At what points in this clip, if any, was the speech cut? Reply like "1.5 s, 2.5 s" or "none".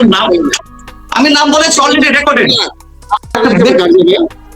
3.2 s